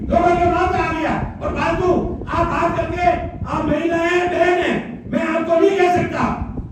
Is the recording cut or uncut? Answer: uncut